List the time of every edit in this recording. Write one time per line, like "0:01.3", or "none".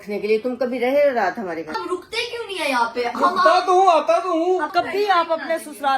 0:04.7